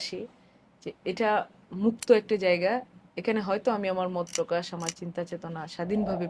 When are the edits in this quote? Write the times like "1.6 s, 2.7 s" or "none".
none

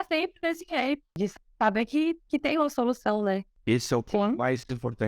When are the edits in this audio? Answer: 1.1 s, 3.5 s

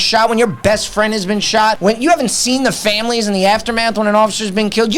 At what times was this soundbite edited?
1.8 s

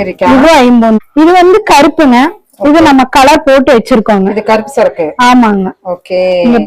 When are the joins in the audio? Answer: 1.0 s

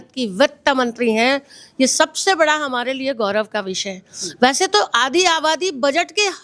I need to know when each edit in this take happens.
none

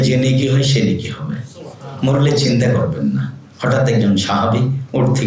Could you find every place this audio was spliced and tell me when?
none

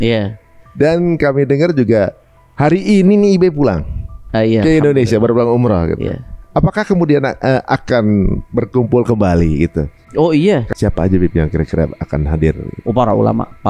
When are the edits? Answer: 10.7 s

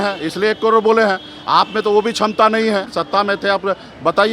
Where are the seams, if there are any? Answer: 3.0 s

